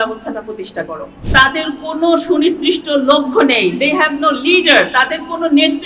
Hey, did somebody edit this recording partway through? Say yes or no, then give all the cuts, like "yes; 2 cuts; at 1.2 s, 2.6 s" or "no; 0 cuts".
yes; 1 cut; at 1.2 s